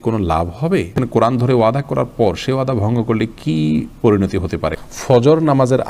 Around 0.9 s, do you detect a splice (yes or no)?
yes